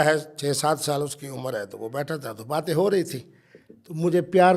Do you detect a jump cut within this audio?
no; 0 cuts

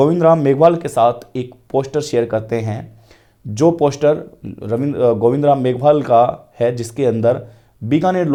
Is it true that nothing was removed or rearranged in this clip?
yes; 0 cuts

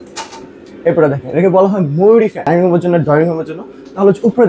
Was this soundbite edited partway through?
yes; 1 cut; at 2.5 s

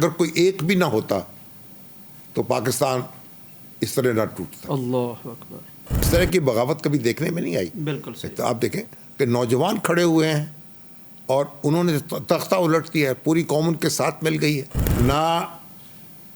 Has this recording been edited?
yes; 2 cuts; at 6.1 s, 14.8 s

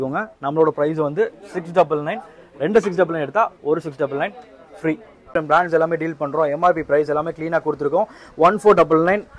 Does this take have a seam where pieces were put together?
yes; 1 cut; at 5.3 s

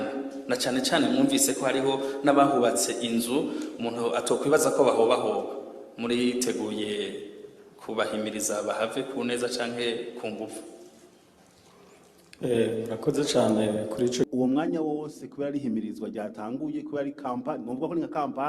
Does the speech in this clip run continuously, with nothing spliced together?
no; 1 cut; at 14.3 s

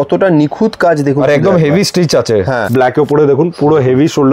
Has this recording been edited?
yes; 1 cut; at 2.6 s

